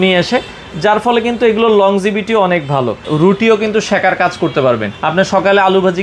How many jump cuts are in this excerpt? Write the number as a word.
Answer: two